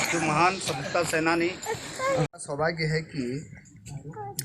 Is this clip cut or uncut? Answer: cut